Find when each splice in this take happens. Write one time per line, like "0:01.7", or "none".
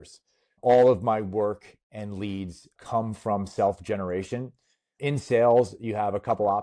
none

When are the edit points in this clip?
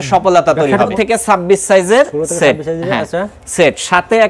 0:00.9

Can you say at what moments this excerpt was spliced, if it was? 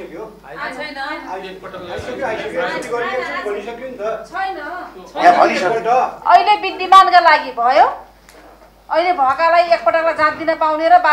none

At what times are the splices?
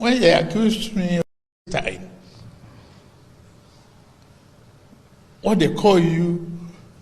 0:01.2

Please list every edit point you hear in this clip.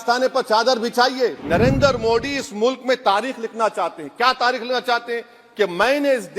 0:01.4

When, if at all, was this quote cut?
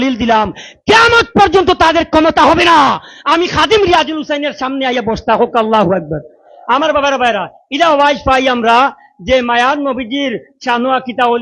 none

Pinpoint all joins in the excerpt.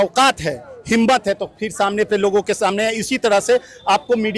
none

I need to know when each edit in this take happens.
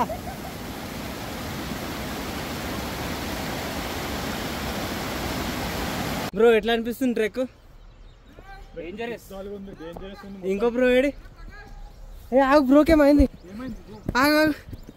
0:06.3

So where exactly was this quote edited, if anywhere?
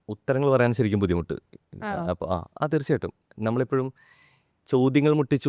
none

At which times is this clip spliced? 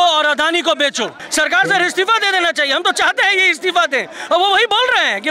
0:01.2

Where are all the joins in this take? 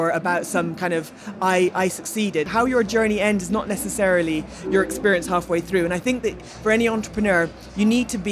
0:02.5

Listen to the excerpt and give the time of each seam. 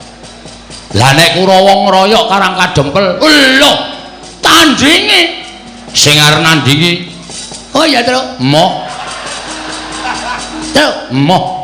none

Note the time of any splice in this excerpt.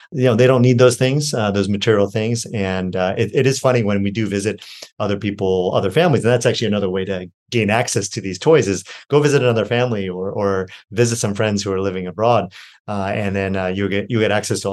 none

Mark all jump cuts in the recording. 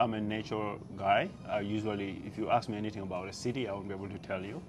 none

